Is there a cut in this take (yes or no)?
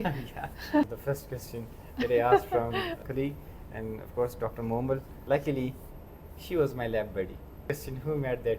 yes